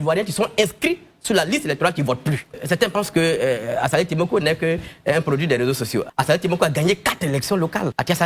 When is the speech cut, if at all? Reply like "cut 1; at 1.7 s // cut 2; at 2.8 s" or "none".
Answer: cut 1; at 2.6 s